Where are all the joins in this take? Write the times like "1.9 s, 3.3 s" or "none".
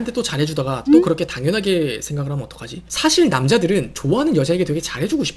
2.8 s